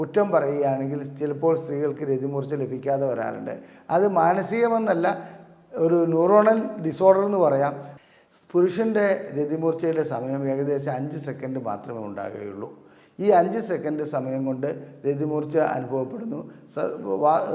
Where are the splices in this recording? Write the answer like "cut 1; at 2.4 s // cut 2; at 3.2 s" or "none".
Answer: cut 1; at 7.9 s